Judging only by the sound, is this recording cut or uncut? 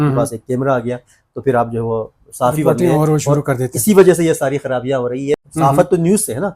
cut